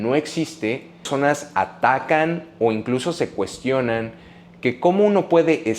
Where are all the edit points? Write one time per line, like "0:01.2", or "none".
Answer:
0:01.1